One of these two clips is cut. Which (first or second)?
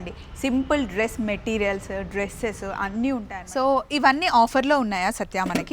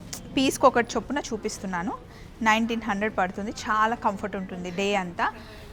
first